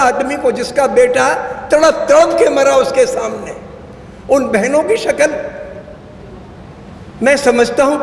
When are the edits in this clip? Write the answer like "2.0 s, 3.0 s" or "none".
none